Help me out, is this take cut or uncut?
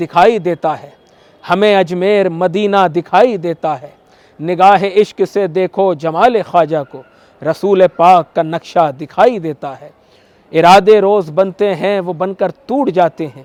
uncut